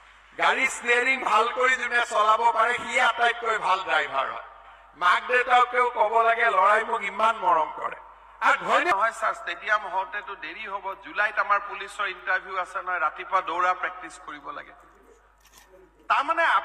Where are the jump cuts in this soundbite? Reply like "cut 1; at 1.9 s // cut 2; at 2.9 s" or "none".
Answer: cut 1; at 8.9 s